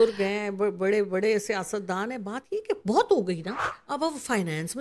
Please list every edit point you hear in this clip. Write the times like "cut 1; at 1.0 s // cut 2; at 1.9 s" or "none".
cut 1; at 3.6 s